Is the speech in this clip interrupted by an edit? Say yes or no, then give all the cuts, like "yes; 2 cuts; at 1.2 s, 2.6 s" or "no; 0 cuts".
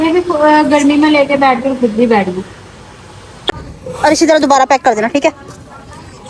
yes; 1 cut; at 3.3 s